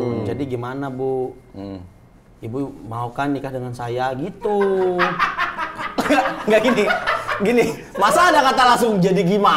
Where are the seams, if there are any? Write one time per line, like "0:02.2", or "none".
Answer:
none